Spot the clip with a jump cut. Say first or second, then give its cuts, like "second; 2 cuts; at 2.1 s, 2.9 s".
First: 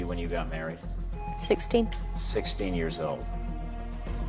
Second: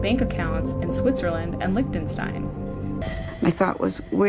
second; 1 cut; at 3.2 s